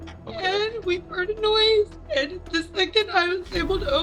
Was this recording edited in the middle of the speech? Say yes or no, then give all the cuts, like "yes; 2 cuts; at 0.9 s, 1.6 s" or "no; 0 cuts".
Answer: yes; 1 cut; at 2.0 s